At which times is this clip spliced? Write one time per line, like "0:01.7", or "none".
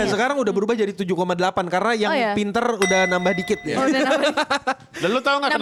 none